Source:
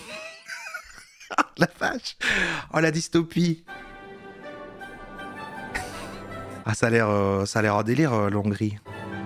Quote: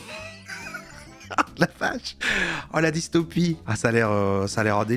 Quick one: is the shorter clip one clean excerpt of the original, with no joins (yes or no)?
no